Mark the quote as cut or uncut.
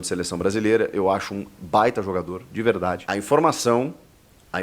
cut